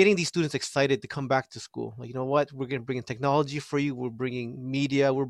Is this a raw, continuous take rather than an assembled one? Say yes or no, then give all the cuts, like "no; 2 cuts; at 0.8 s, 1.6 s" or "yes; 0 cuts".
yes; 0 cuts